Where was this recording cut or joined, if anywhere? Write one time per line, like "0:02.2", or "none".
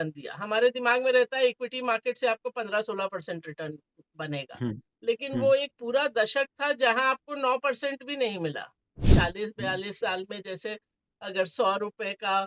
0:09.1